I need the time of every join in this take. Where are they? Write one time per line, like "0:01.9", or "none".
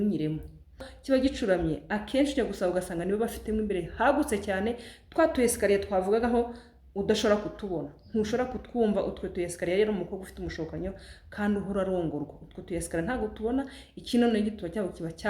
0:00.9